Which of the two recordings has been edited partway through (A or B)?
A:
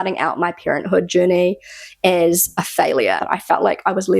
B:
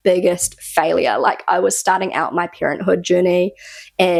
A